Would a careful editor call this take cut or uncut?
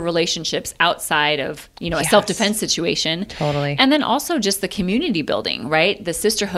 uncut